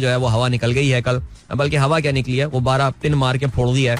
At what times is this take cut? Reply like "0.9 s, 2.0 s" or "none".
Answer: none

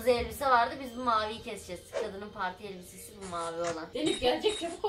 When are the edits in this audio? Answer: 3.9 s

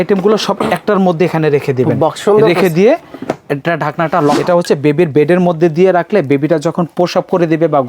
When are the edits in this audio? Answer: 4.4 s

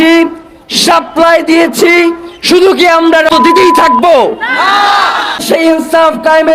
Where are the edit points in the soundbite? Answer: 3.4 s, 5.4 s

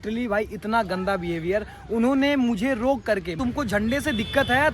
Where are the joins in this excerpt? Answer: 3.3 s

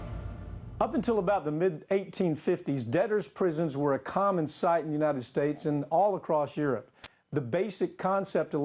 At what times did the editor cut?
none

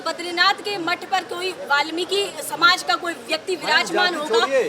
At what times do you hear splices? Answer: none

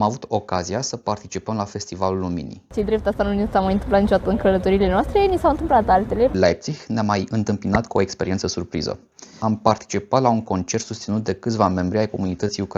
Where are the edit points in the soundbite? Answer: 2.7 s, 6.3 s, 9.4 s

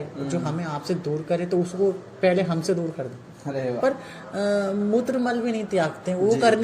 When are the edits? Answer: 3.8 s

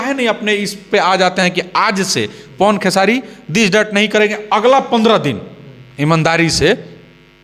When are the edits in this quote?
none

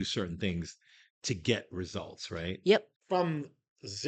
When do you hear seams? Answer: 2.9 s

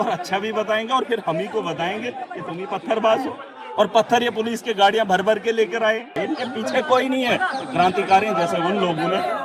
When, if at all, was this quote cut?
6.2 s

